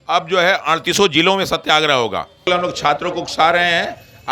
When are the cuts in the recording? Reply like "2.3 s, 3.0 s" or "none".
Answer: 2.5 s